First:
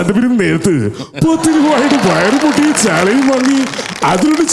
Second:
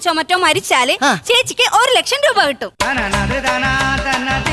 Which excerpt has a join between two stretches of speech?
second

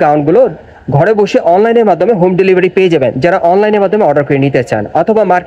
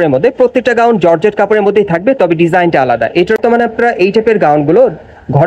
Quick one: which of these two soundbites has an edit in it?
second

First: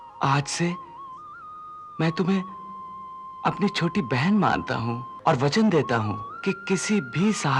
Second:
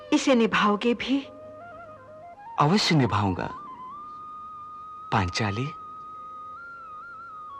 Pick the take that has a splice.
first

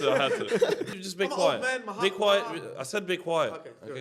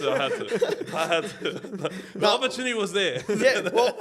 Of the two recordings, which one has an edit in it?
first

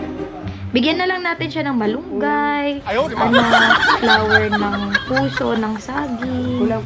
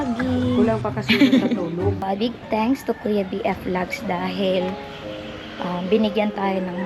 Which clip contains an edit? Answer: second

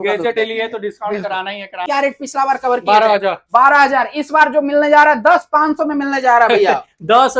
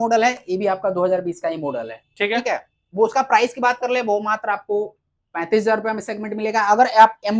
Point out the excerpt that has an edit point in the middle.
first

